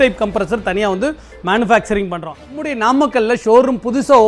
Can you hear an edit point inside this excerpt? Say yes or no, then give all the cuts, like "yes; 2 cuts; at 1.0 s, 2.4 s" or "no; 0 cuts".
yes; 1 cut; at 2.3 s